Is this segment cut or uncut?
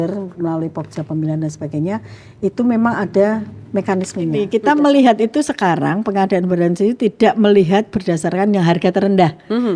cut